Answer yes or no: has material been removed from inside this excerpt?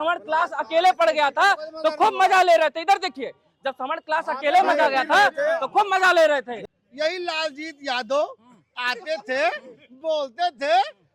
yes